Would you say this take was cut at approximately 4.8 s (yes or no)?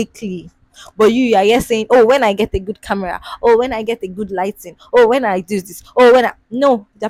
no